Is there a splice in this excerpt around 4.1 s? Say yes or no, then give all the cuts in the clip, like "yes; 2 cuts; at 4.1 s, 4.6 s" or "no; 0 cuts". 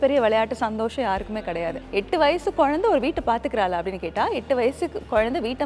no; 1 cut; at 1.8 s